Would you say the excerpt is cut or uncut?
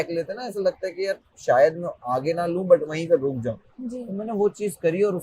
uncut